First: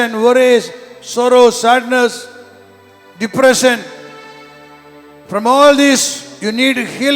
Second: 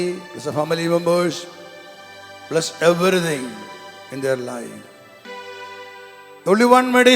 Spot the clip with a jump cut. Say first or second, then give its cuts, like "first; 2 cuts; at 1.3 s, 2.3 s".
second; 1 cut; at 5.3 s